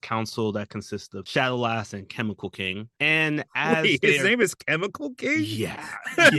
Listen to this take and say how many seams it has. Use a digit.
2